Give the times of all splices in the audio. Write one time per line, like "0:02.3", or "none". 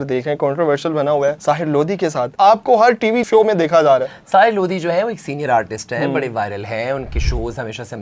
none